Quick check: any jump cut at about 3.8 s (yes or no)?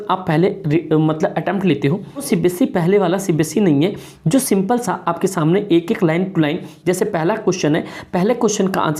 no